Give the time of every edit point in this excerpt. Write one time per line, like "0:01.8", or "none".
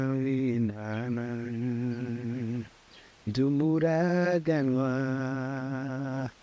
none